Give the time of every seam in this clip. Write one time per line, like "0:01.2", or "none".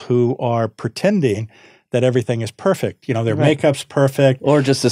none